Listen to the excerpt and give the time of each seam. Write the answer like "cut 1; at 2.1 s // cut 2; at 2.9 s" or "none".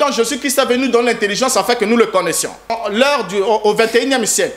cut 1; at 2.8 s